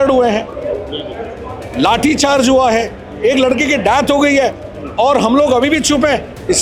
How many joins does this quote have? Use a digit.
0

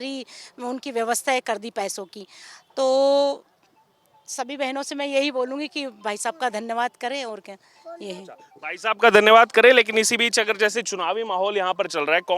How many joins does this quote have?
0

